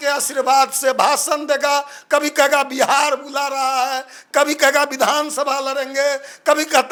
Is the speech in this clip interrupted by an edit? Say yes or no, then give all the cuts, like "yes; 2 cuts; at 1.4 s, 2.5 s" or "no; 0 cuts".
no; 0 cuts